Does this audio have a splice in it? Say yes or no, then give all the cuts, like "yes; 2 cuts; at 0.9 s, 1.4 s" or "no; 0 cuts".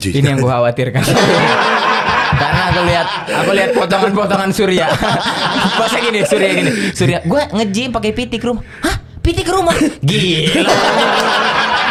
no; 0 cuts